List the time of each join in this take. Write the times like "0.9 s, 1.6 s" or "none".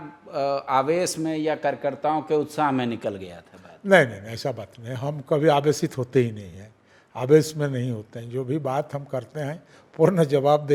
none